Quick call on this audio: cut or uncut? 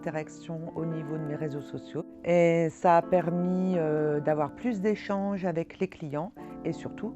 cut